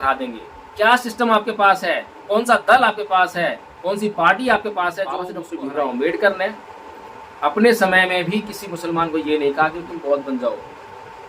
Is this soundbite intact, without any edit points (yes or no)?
no